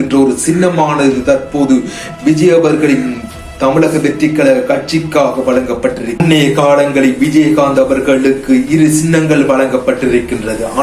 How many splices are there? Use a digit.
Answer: 1